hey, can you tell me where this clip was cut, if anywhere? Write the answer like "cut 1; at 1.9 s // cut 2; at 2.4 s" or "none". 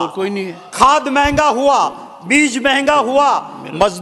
none